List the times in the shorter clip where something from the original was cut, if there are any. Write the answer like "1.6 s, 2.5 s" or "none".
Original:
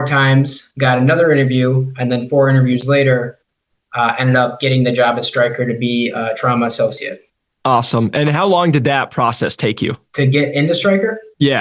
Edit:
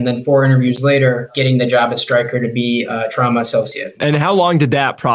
1.3 s, 4.0 s